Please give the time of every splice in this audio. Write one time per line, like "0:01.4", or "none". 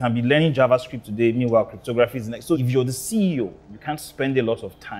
0:02.6